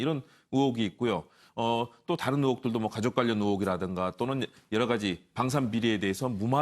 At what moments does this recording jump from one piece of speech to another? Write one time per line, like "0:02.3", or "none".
0:05.5